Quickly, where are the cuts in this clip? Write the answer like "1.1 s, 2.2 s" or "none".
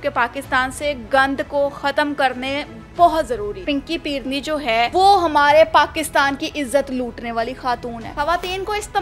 3.6 s, 4.9 s, 8.1 s

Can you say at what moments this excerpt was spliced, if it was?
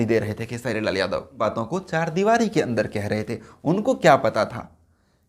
1.4 s

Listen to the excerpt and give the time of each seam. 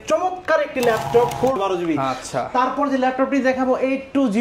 1.6 s

